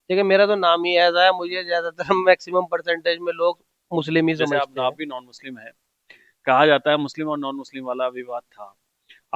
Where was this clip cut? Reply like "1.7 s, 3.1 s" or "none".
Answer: 4.5 s

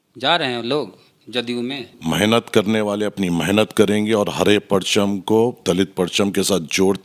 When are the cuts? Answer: 1.9 s

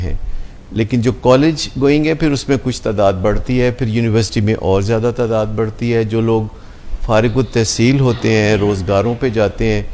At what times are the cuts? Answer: none

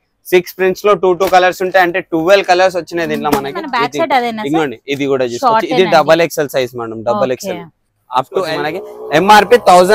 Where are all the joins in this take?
3.8 s, 8.4 s

